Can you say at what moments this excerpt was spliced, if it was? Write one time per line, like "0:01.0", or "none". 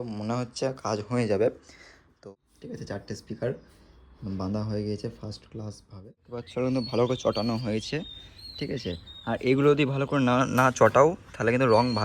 0:02.2
0:06.3